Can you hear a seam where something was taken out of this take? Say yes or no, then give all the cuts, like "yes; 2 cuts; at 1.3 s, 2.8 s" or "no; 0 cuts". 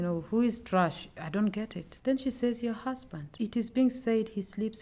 yes; 1 cut; at 3.2 s